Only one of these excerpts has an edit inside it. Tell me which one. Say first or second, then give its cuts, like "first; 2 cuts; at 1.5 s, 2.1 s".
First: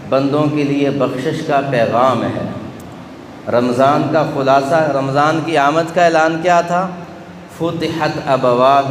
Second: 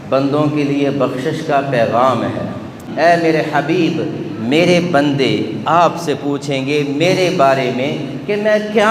second; 1 cut; at 2.8 s